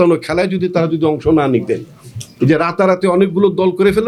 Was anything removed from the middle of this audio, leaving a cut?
no; 0 cuts

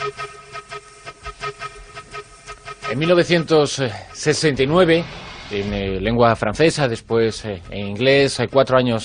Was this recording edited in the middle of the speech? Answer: no; 0 cuts

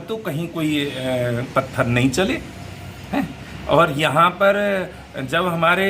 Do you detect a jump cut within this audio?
no; 0 cuts

